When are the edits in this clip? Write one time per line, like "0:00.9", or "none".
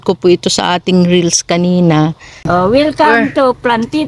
0:02.4